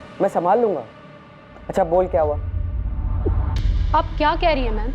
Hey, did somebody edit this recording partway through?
no; 0 cuts

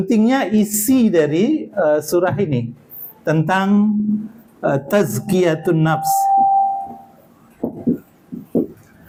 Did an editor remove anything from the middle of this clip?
no; 0 cuts

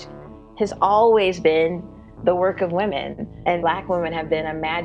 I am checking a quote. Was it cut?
yes; 1 cut; at 3.5 s

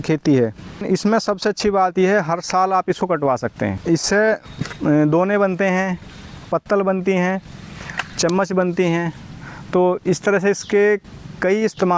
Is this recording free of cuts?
no; 2 cuts; at 0.8 s, 3.8 s

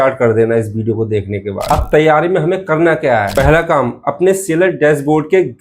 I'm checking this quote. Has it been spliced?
no; 0 cuts

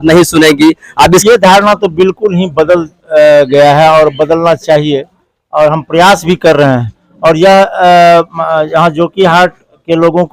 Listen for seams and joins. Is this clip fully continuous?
no; 1 cut; at 1.2 s

